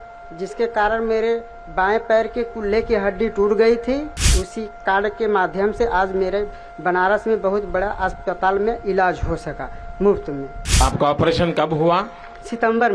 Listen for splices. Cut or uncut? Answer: cut